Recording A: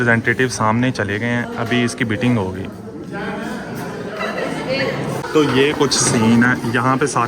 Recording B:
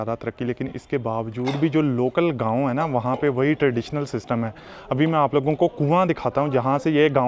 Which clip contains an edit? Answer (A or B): A